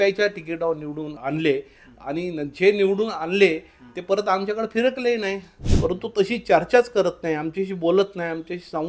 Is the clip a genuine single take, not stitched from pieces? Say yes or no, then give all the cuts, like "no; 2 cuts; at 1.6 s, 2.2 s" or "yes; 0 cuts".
no; 2 cuts; at 1.1 s, 5.7 s